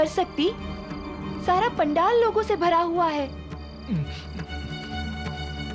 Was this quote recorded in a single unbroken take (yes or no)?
yes